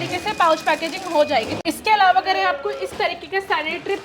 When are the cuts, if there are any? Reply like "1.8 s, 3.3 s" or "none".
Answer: 1.5 s